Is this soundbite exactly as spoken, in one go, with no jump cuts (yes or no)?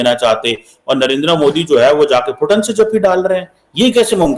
yes